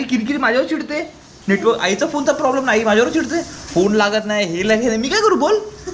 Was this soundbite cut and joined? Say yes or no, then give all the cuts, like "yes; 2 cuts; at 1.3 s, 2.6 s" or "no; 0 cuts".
no; 0 cuts